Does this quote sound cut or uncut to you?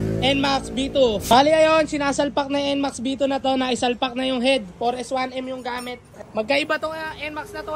cut